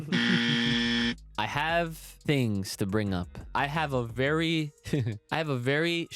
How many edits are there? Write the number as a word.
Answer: four